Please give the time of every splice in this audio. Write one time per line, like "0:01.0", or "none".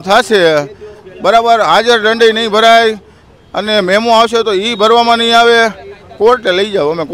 none